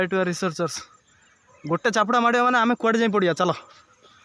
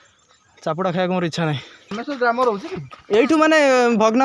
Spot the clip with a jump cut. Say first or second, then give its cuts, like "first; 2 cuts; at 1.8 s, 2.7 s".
second; 1 cut; at 2.0 s